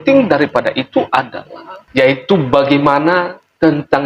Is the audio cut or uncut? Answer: uncut